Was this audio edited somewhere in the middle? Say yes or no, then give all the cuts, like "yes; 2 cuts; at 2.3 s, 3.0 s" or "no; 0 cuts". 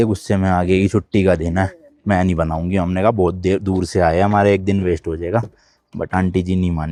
no; 0 cuts